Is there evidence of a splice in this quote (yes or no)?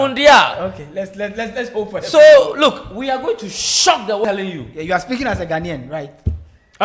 yes